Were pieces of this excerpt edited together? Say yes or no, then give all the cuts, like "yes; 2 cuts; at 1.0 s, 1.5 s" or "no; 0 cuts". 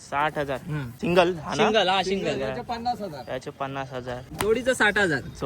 yes; 2 cuts; at 0.9 s, 4.3 s